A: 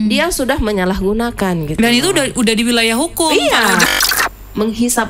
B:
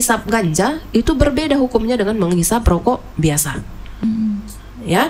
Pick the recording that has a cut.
A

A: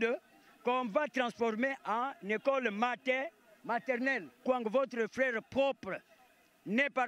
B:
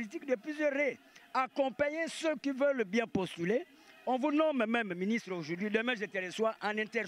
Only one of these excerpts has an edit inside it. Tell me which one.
A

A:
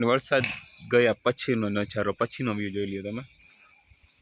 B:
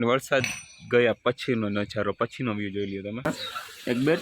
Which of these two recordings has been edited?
B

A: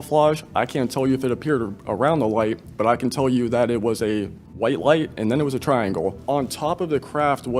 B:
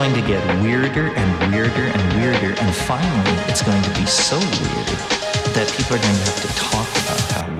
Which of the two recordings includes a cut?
A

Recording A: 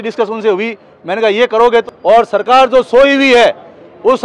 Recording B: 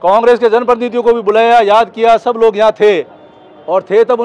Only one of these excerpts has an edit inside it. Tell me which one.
A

